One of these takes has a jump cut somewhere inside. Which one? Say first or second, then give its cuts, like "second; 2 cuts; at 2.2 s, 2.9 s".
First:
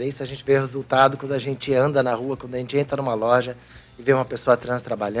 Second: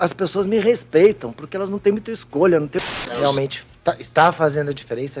second; 1 cut; at 2.8 s